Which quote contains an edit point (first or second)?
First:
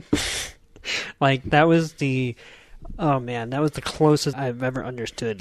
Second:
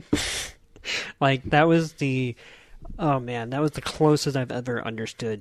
first